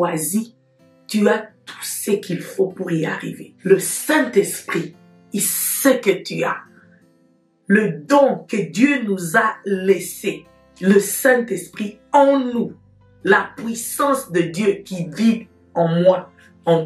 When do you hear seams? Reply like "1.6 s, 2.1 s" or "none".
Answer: none